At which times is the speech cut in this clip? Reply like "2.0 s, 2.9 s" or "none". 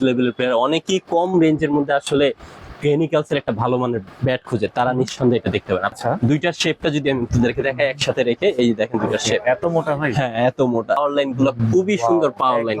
5.9 s, 11.0 s